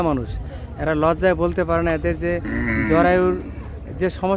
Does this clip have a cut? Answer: no; 0 cuts

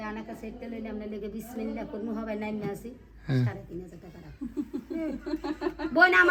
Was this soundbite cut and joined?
no; 0 cuts

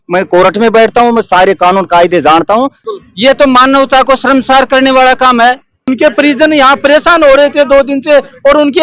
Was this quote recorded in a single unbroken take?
no; 2 cuts; at 2.8 s, 5.7 s

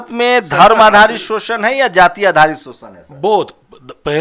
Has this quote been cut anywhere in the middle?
no; 0 cuts

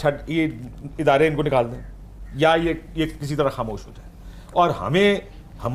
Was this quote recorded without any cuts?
yes; 0 cuts

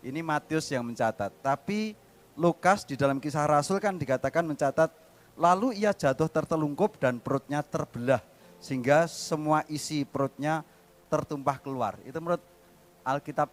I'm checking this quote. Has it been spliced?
no; 0 cuts

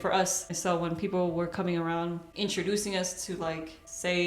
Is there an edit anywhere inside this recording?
yes; 1 cut; at 2.3 s

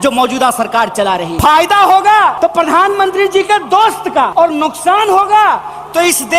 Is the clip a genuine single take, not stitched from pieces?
no; 3 cuts; at 1.3 s, 2.3 s, 4.3 s

